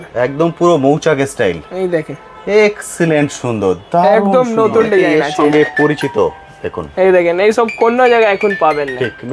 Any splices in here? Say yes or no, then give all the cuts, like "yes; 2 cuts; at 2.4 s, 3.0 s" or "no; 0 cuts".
yes; 1 cut; at 5.1 s